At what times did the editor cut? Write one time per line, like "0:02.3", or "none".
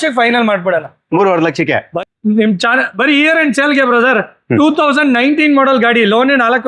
0:01.9